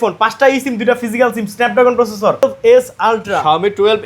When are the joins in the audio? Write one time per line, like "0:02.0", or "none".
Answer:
0:02.4